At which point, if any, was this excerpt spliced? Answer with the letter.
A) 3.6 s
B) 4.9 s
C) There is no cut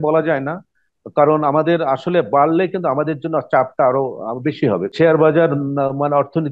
B